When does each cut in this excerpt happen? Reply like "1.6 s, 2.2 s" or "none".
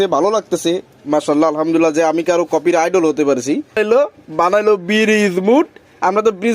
3.7 s